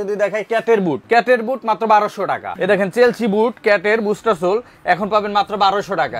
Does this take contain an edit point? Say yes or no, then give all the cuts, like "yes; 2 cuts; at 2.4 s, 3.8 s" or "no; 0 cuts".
yes; 2 cuts; at 1.0 s, 2.5 s